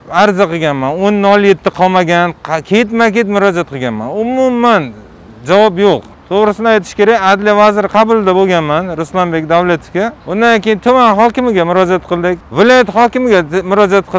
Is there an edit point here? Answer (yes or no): yes